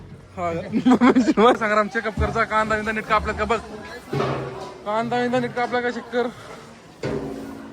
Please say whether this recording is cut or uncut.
cut